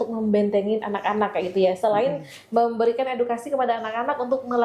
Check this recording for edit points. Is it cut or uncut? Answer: uncut